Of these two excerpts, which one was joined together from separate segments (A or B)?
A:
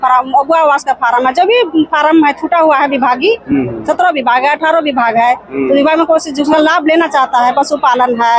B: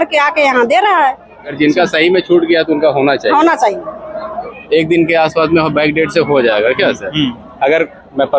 B